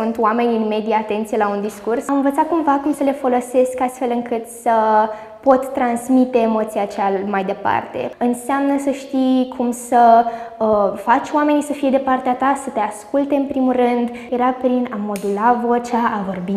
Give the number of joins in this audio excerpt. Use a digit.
3